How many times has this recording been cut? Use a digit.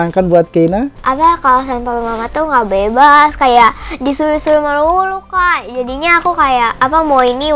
1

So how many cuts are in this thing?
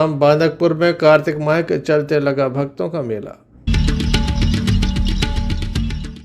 1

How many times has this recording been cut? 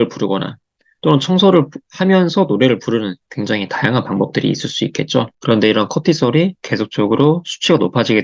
1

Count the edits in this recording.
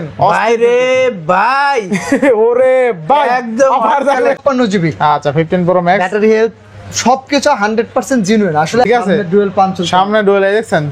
2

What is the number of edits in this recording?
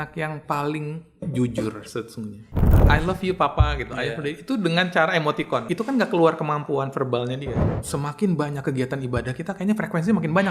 3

